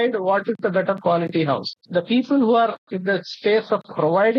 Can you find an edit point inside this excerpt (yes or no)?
no